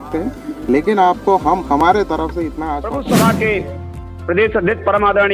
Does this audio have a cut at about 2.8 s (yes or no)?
yes